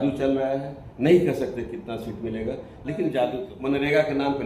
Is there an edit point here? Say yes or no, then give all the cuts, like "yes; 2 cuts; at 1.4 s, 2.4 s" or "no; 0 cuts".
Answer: yes; 1 cut; at 3.5 s